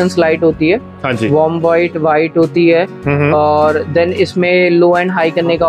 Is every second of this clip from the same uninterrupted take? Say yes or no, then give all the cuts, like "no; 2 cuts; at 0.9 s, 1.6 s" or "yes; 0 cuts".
yes; 0 cuts